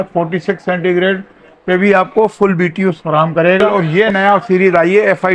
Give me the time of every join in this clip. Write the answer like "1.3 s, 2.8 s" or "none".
3.7 s